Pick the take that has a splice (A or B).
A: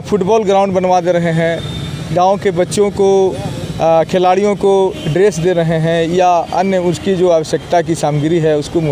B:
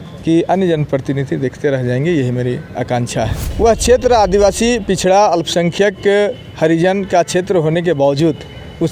B